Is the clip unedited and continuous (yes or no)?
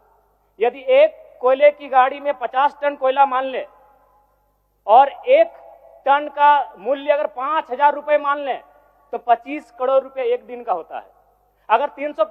yes